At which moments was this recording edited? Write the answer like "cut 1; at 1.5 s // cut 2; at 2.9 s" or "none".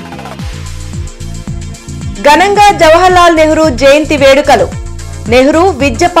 cut 1; at 2.1 s